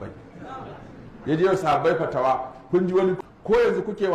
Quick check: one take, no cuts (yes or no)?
no